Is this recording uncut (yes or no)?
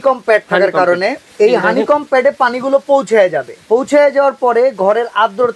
no